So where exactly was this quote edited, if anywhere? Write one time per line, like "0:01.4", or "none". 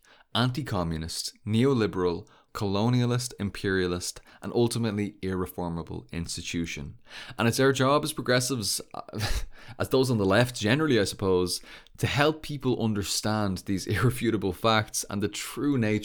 0:02.4